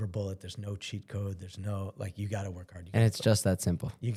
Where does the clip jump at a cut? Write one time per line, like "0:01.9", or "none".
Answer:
none